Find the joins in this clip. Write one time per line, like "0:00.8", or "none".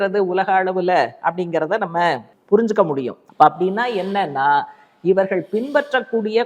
0:02.3
0:03.2

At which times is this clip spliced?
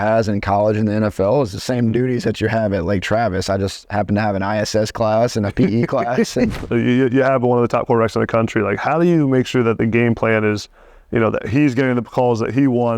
0:06.6

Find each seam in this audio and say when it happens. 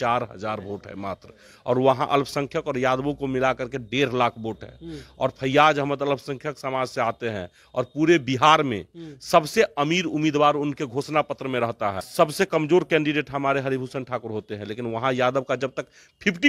0:12.0

